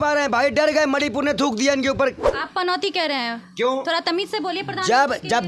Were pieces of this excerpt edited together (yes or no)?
yes